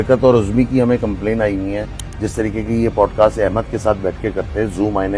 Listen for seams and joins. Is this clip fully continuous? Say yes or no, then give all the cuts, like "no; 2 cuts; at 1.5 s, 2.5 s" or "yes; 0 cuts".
yes; 0 cuts